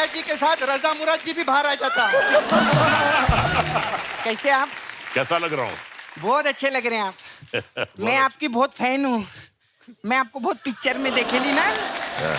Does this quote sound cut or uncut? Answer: cut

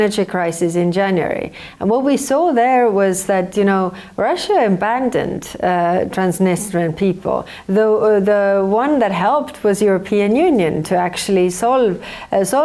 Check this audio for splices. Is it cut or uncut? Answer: uncut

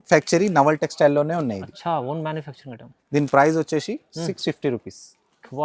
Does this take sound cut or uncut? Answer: uncut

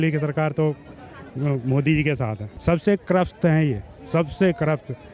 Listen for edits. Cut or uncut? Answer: cut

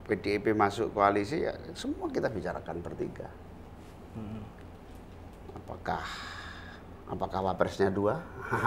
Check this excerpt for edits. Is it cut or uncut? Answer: uncut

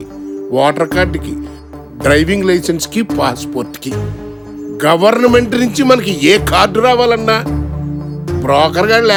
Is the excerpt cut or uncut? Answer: uncut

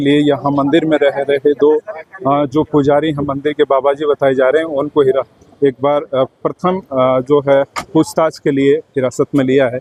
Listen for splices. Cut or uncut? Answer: uncut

